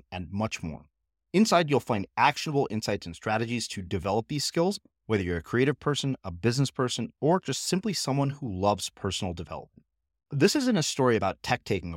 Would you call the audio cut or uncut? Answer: uncut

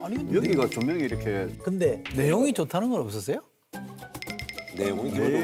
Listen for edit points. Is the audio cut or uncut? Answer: uncut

